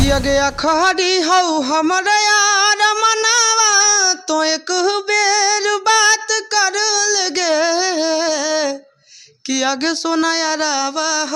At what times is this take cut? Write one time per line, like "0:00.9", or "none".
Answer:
none